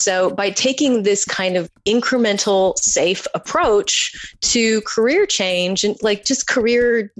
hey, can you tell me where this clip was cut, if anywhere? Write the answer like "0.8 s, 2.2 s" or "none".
1.6 s